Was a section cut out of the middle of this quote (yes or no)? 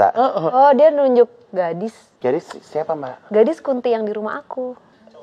yes